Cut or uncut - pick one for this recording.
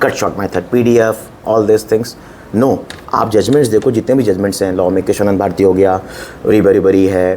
uncut